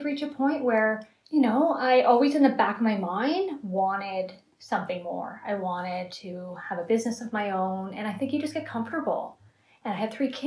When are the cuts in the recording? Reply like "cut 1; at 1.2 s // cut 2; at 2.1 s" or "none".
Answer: cut 1; at 1.1 s